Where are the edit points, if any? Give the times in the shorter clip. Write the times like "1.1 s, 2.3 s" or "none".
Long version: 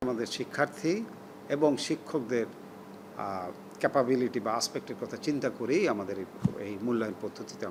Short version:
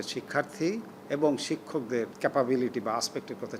0.9 s, 2.1 s